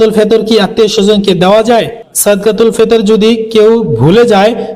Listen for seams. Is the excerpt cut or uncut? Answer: cut